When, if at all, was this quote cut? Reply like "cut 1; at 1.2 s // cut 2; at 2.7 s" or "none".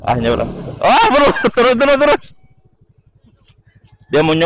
none